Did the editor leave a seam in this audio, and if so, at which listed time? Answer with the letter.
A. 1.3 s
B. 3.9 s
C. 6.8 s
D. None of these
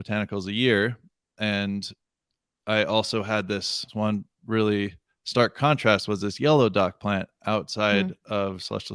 B